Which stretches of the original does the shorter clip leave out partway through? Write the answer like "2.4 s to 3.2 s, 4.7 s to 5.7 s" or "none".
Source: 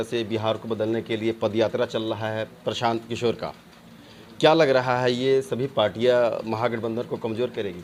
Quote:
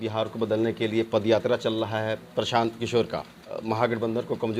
3.9 s to 6.4 s